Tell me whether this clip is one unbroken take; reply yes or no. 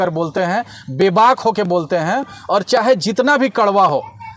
yes